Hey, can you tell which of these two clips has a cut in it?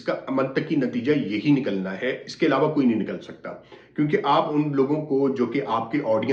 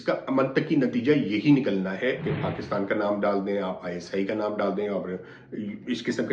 second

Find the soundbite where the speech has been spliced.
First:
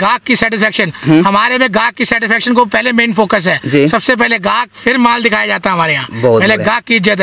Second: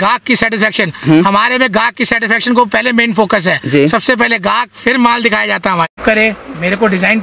second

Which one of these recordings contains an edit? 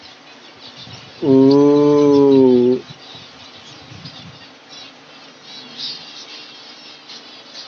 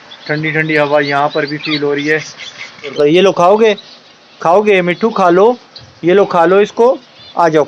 second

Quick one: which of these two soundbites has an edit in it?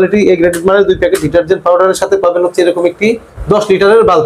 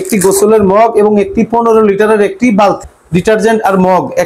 second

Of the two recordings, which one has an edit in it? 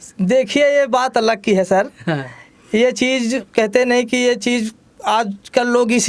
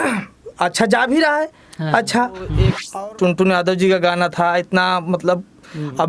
second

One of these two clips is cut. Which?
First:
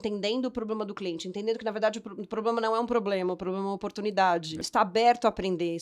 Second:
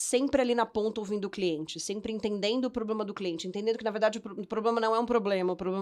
first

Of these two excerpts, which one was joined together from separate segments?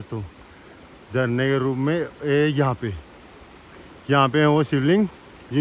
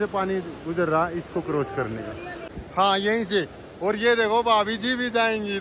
second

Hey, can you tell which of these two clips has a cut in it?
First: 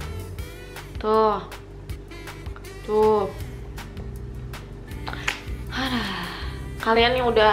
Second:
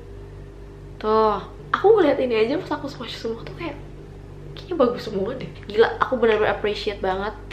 second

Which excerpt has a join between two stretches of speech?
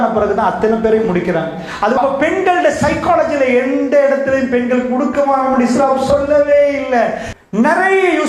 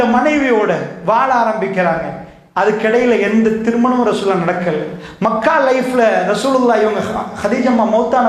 first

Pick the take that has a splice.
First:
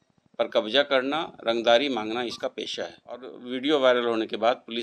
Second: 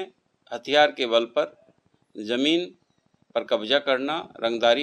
first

